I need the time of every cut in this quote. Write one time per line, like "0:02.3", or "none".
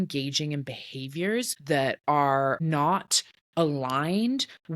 0:01.6
0:02.6